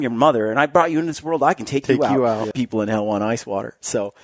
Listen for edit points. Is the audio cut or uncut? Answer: cut